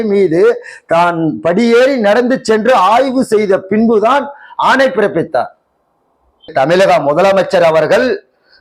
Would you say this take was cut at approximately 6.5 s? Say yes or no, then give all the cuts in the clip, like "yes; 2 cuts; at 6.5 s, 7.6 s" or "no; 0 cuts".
yes; 1 cut; at 6.5 s